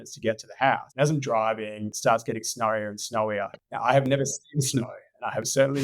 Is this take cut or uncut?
cut